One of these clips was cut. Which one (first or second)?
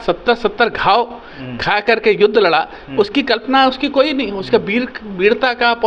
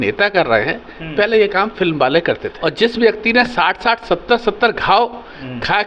second